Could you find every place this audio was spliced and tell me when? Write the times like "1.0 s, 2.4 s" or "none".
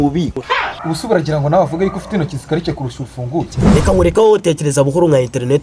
none